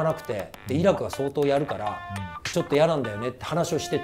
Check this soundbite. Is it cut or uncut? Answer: uncut